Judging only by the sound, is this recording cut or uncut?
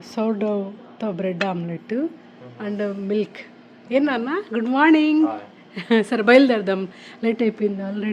uncut